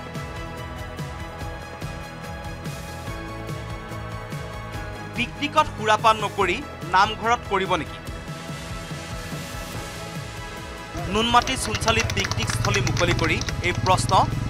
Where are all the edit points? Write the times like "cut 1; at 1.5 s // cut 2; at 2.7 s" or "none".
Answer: none